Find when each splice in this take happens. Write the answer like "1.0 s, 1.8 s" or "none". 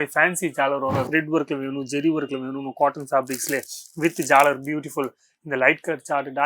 1.1 s